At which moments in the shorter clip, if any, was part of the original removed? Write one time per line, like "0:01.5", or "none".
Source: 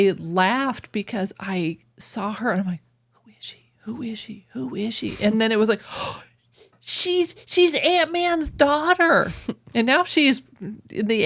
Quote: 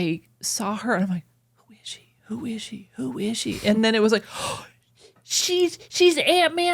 none